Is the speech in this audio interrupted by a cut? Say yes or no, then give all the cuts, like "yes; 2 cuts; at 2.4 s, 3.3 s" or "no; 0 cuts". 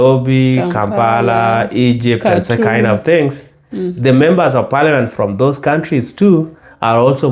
no; 0 cuts